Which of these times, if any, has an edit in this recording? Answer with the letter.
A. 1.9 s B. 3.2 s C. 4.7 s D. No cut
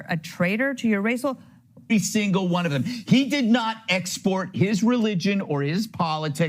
A